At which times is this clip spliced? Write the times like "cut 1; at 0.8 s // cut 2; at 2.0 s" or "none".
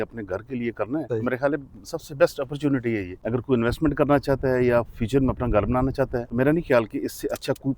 cut 1; at 1.1 s // cut 2; at 3.1 s // cut 3; at 6.2 s